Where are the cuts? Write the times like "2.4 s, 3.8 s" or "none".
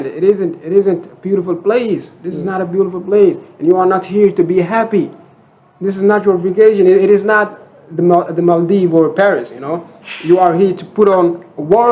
none